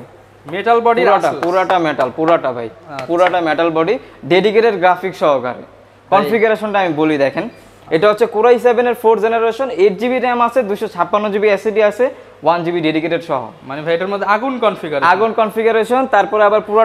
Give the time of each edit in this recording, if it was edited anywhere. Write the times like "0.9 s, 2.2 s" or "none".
none